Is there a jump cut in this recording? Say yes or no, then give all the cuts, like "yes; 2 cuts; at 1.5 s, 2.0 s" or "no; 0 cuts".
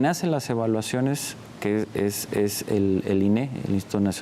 no; 0 cuts